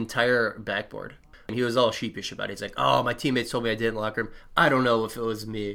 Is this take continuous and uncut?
no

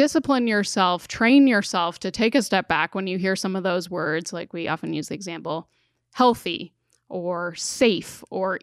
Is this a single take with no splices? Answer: yes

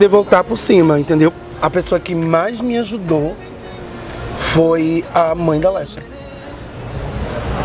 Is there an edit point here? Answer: yes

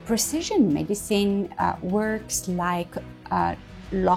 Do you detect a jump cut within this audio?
no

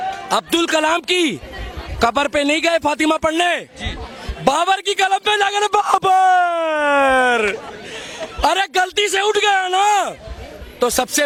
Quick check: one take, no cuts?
yes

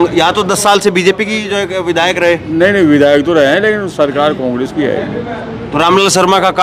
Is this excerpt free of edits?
yes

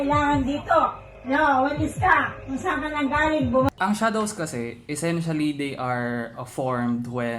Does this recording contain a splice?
yes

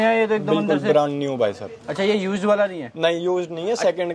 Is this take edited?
no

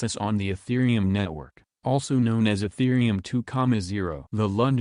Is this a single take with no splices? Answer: no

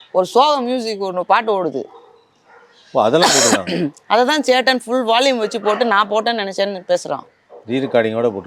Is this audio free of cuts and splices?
yes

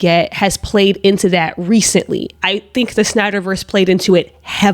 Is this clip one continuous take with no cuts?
yes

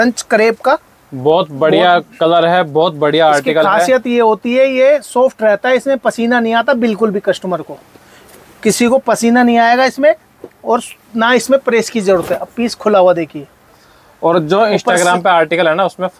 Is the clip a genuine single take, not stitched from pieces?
yes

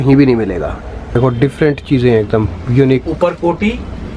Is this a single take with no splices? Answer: no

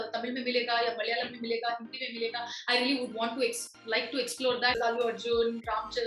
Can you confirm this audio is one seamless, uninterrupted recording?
no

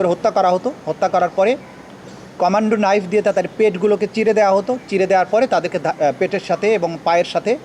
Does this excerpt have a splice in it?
no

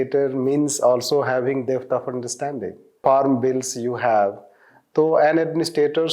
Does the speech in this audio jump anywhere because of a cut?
yes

